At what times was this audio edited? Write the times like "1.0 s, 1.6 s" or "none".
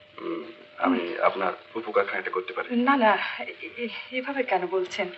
none